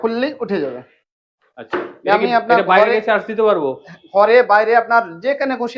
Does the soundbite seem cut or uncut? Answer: uncut